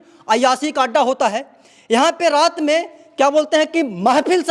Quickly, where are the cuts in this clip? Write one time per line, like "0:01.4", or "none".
none

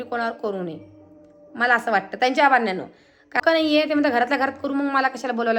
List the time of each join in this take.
0:03.4

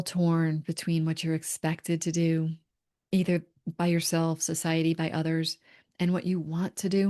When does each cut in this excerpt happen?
none

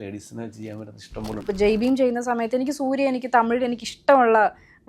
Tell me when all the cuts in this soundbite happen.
0:01.4

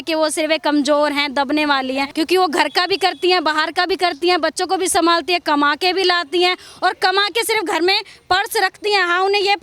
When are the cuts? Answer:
0:02.1

